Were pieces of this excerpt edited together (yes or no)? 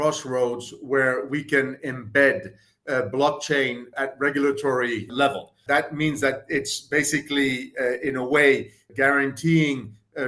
yes